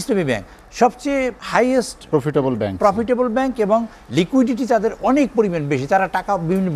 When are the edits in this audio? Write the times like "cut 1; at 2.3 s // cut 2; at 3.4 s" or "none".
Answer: cut 1; at 1.4 s